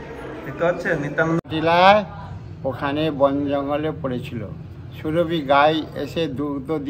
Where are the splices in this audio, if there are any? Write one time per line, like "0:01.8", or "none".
0:01.5